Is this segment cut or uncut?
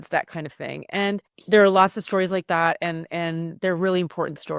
cut